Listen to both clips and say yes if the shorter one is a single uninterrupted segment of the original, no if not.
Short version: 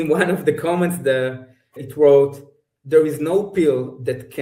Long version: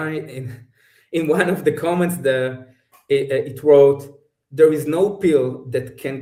no